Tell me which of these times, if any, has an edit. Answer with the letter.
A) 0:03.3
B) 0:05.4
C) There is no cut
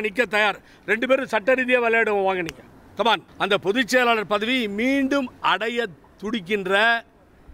A